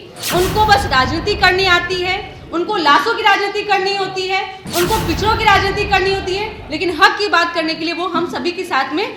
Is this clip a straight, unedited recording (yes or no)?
yes